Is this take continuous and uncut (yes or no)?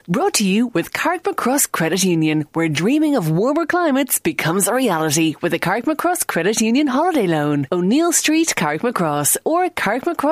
yes